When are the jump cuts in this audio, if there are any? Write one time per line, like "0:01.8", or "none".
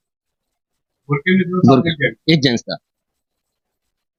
none